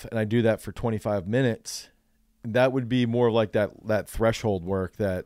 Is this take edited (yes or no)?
no